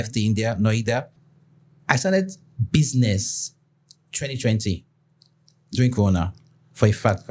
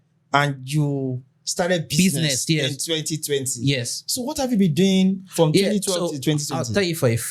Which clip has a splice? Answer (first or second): first